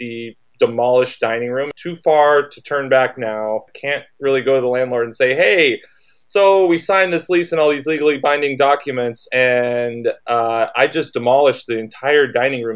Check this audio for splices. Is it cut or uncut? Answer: cut